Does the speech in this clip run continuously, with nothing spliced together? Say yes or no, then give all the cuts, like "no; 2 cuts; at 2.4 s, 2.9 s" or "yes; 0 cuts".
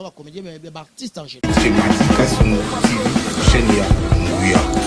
no; 1 cut; at 1.4 s